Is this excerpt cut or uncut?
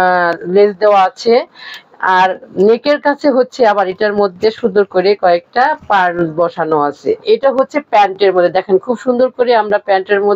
cut